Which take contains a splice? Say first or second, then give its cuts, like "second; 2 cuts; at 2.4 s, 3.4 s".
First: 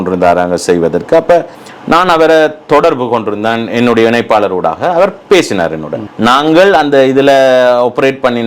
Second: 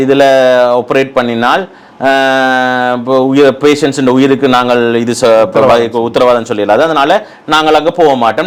first; 2 cuts; at 1.6 s, 6.0 s